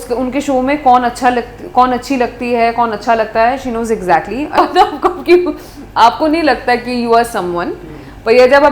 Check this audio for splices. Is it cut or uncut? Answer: cut